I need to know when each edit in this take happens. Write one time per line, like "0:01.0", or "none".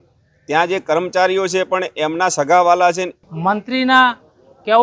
0:03.1

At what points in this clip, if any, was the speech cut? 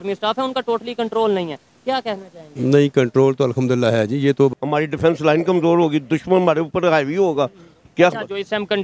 0:04.5

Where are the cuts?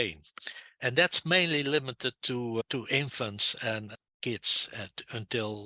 0:02.6
0:03.9

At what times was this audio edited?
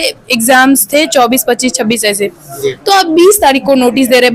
none

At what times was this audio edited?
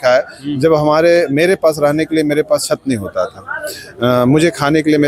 none

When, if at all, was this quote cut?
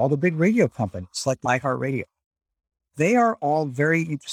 0:01.4
0:02.8

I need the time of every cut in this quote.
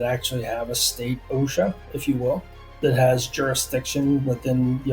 none

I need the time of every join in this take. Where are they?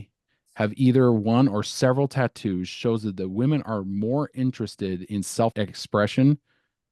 0:05.5

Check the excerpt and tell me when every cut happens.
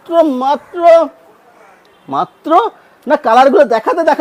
none

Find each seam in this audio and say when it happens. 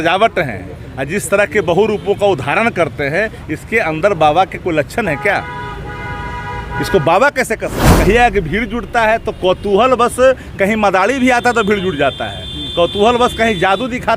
0:07.9

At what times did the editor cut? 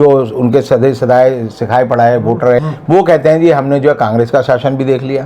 0:02.6

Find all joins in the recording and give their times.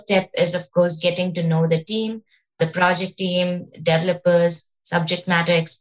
0:02.6

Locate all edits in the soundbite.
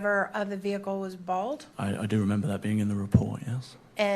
0:01.7
0:02.6

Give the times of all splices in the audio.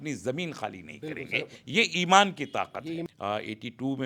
0:03.0

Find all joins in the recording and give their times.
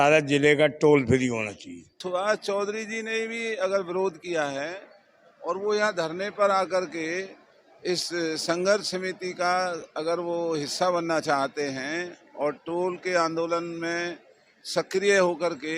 0:02.0

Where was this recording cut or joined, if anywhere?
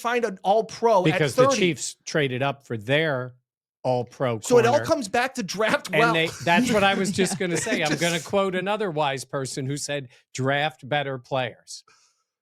none

